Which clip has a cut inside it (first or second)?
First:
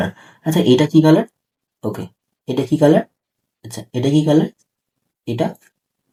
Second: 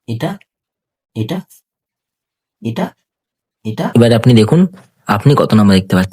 second